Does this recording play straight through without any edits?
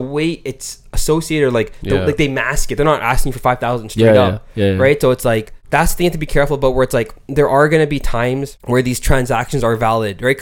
no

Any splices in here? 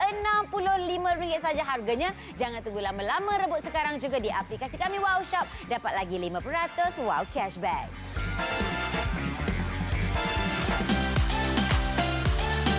yes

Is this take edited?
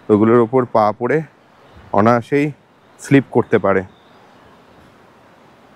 no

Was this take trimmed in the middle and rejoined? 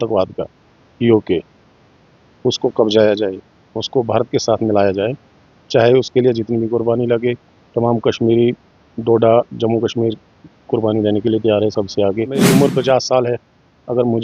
yes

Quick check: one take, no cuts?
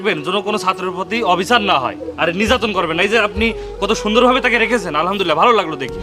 yes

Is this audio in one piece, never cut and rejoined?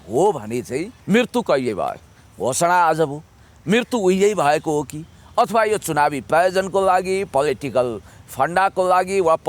no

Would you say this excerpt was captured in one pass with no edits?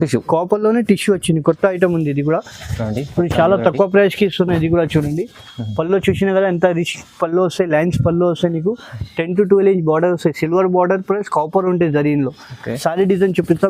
yes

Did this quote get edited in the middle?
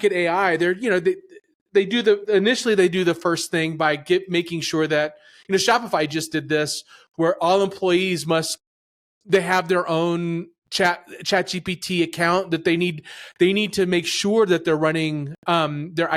no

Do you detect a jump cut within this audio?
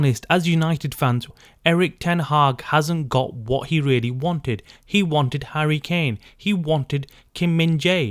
yes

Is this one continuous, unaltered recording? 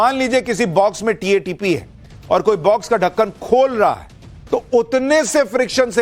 no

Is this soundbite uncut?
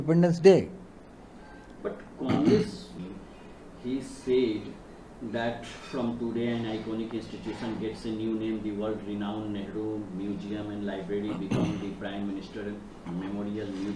yes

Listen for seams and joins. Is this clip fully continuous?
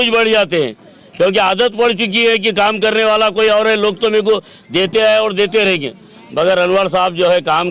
yes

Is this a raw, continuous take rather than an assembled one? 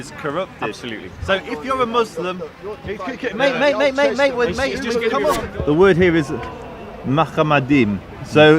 no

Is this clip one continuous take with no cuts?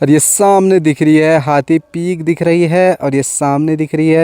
yes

